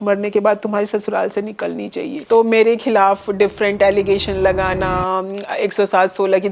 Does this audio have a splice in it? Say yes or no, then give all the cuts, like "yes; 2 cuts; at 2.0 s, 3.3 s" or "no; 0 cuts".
yes; 1 cut; at 2.1 s